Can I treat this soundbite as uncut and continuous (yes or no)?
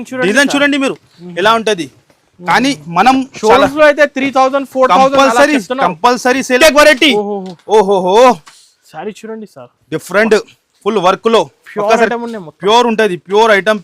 no